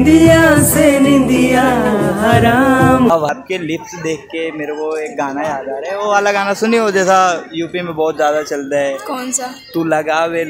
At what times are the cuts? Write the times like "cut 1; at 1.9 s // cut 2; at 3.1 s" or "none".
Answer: cut 1; at 3.3 s